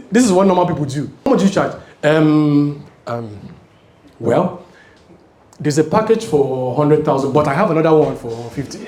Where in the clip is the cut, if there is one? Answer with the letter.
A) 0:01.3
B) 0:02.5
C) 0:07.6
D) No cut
A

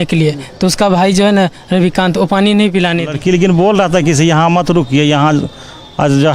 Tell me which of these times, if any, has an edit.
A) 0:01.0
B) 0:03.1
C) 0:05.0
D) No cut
B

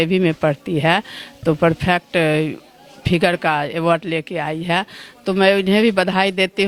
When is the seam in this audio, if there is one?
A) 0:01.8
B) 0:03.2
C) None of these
C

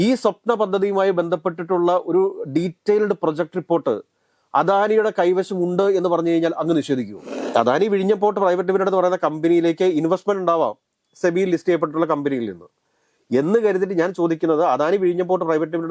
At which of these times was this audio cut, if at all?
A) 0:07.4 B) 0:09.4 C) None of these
A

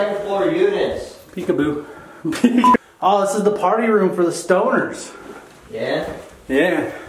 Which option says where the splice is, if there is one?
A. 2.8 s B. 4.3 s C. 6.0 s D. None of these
A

